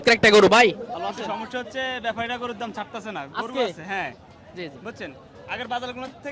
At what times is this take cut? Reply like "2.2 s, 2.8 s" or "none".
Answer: 0.9 s

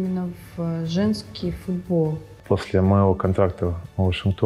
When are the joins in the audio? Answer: 2.3 s

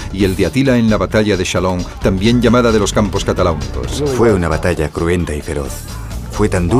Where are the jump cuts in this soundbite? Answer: 3.2 s

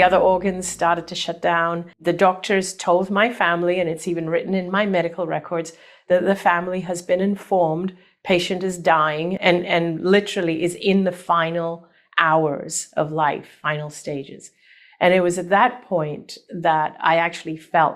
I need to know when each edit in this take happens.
1.9 s, 9.4 s

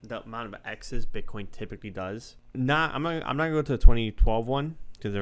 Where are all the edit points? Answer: 2.4 s

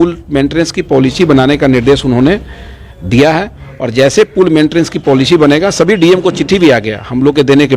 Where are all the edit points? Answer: none

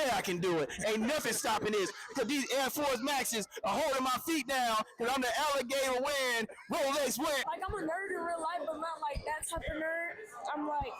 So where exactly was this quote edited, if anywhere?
7.4 s

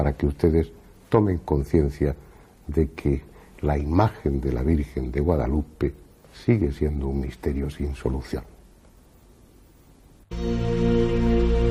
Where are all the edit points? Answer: none

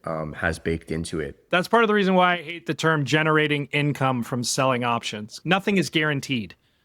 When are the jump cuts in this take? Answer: 1.4 s, 5.4 s

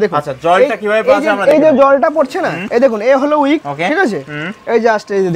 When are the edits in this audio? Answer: none

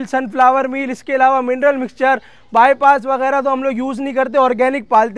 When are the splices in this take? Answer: none

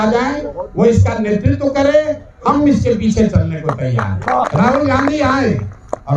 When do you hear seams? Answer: 4.4 s

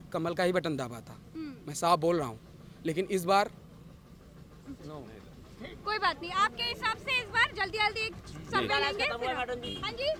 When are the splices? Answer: none

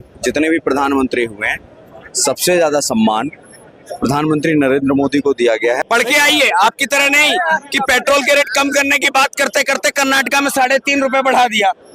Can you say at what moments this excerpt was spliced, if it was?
5.8 s

